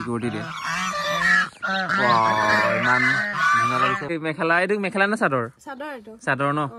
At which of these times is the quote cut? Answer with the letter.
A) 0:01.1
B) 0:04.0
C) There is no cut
B